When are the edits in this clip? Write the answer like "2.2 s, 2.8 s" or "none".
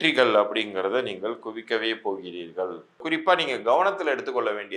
3.0 s